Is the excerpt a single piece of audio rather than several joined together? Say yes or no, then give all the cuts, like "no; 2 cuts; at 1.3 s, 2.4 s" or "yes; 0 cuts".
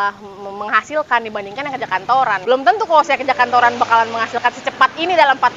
no; 1 cut; at 2.4 s